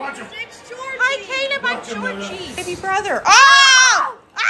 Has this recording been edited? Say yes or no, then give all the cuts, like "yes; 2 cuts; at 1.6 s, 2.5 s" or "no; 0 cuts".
yes; 1 cut; at 2.7 s